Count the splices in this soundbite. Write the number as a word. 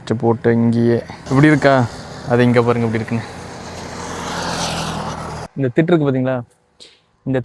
zero